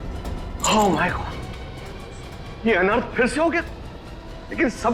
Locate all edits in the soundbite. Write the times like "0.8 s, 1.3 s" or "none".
none